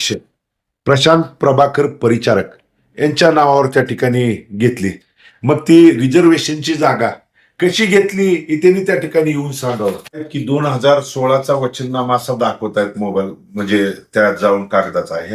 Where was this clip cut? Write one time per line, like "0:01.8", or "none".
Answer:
0:10.3